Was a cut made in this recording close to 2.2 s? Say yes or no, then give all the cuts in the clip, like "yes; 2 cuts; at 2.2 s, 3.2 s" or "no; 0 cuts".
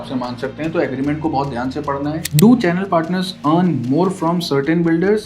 yes; 1 cut; at 2.2 s